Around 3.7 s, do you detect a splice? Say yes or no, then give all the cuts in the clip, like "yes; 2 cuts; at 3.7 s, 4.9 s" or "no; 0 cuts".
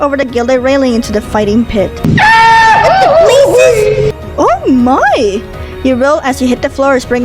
no; 0 cuts